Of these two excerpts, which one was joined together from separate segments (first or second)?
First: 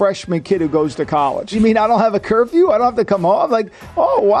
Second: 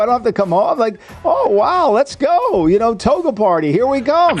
first